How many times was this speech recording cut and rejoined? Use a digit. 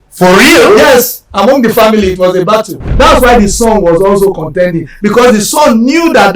1